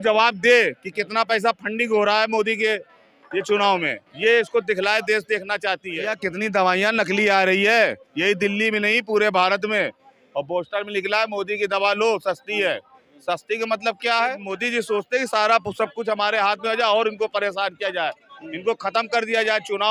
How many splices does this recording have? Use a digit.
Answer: 2